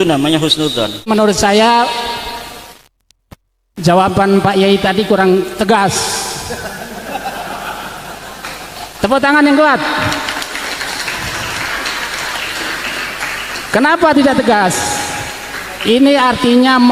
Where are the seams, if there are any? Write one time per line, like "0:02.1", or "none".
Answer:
0:01.1